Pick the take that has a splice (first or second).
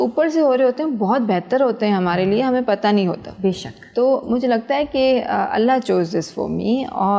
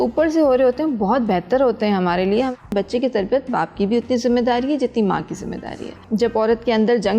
second